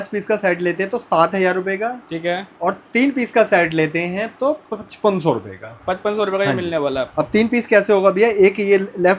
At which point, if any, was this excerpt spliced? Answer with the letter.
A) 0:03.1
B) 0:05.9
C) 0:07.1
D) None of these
D